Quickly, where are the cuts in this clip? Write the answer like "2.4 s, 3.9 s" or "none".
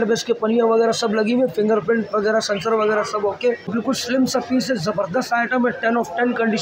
3.7 s